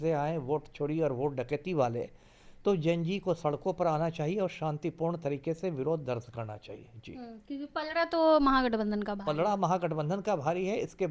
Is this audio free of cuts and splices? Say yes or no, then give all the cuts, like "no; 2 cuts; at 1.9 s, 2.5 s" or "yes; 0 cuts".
yes; 0 cuts